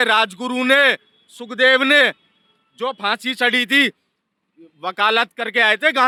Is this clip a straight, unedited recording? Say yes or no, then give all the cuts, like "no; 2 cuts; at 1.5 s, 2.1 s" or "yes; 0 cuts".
yes; 0 cuts